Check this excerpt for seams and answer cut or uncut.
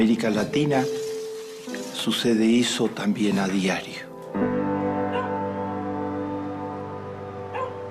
cut